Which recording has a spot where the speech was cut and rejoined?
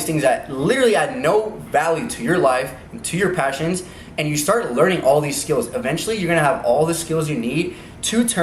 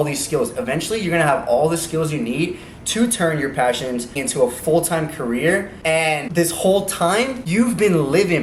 second; 3 cuts; at 4.2 s, 6.0 s, 7.4 s

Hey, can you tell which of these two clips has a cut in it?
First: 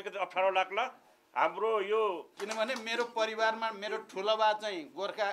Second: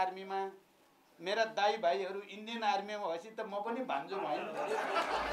first; 1 cut; at 2.3 s

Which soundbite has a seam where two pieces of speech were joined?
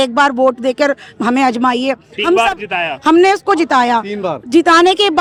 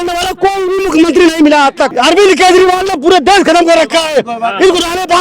second; 1 cut; at 1.9 s

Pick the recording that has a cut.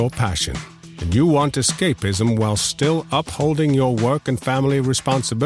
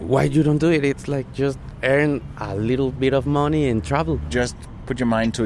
second; 2 cuts; at 3.0 s, 4.3 s

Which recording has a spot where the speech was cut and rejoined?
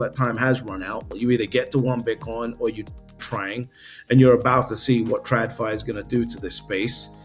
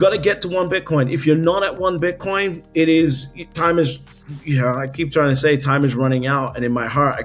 first; 1 cut; at 1.0 s

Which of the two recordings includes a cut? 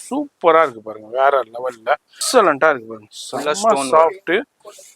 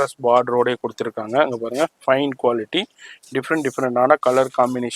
first; 1 cut; at 2.1 s

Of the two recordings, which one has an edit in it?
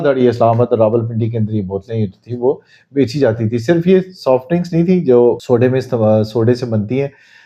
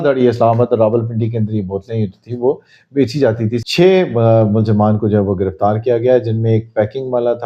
second; 1 cut; at 3.6 s

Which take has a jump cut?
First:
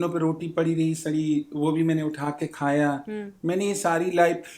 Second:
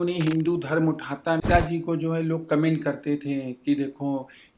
second; 1 cut; at 1.4 s

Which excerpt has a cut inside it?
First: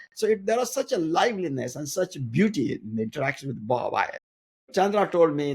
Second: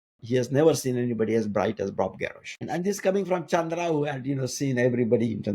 first; 1 cut; at 4.2 s

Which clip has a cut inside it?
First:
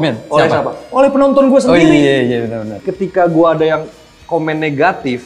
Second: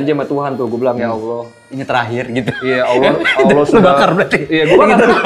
first; 1 cut; at 2.8 s

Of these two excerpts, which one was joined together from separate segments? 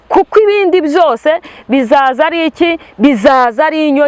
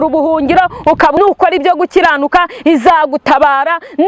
second; 1 cut; at 1.2 s

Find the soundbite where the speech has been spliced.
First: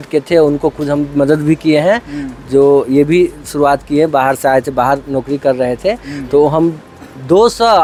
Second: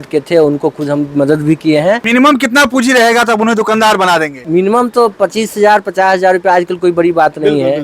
second; 2 cuts; at 2.0 s, 4.4 s

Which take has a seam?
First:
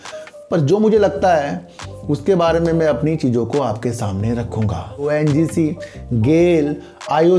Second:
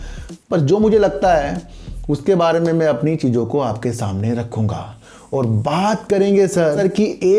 first; 1 cut; at 5.0 s

